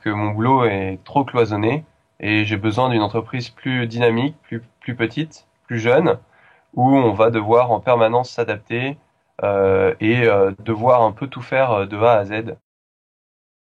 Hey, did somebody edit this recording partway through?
no; 0 cuts

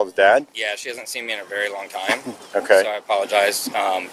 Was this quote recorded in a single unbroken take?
yes; 0 cuts

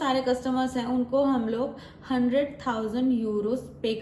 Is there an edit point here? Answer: no; 0 cuts

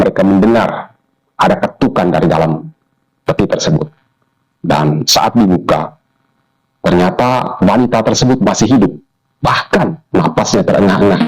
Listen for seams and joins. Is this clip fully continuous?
yes; 0 cuts

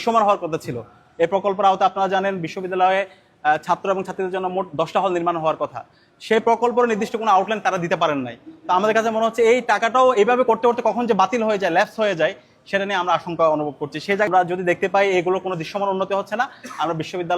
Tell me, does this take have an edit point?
yes; 1 cut; at 14.3 s

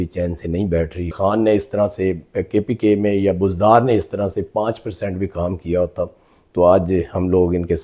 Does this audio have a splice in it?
yes; 1 cut; at 1.2 s

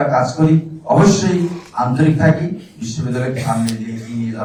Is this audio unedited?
yes; 0 cuts

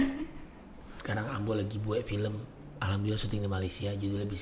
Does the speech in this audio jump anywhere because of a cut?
yes; 1 cut; at 0.9 s

